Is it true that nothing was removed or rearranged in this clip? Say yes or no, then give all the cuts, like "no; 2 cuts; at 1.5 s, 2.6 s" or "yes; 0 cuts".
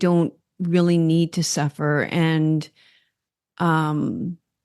yes; 0 cuts